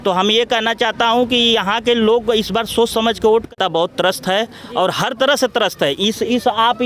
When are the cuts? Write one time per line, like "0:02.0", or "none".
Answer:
0:03.5